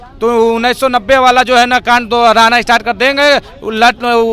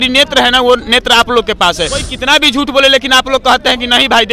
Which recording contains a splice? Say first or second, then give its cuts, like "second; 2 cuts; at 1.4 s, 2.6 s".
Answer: second; 1 cut; at 2.1 s